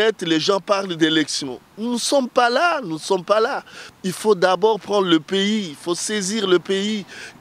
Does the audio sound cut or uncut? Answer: uncut